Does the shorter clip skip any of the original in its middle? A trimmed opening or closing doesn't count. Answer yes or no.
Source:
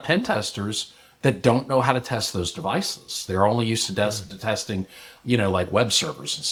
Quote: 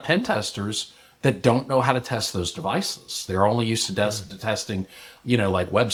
no